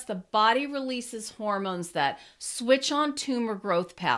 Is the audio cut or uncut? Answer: uncut